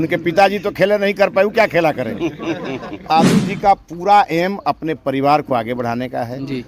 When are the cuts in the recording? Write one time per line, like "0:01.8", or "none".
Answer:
0:03.1